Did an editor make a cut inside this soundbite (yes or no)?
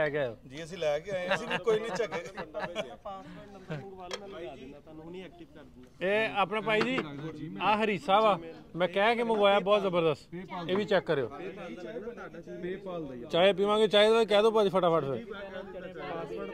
no